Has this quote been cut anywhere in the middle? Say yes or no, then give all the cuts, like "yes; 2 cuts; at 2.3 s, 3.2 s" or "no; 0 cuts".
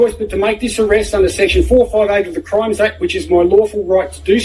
no; 0 cuts